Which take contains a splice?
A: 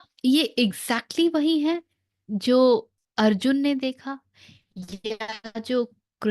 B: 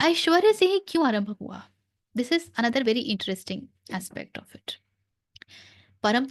A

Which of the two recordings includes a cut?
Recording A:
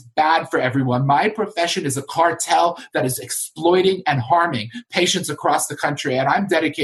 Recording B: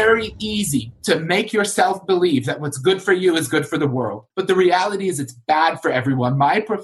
B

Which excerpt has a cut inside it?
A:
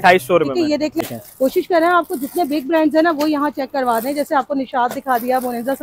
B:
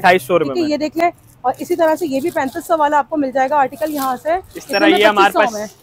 A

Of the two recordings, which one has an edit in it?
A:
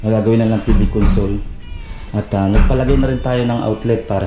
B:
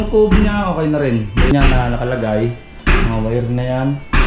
B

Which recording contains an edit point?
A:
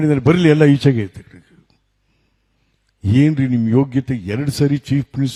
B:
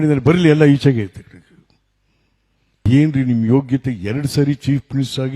B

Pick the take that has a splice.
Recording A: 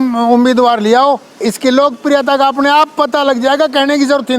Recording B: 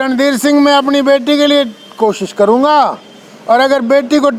A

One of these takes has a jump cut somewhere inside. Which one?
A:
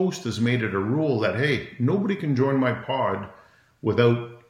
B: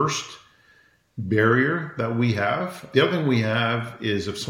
B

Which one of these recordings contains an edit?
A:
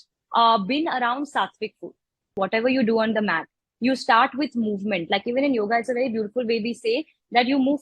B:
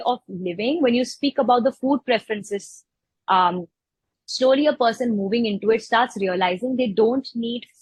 A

